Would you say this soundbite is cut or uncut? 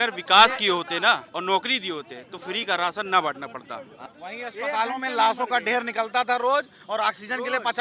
cut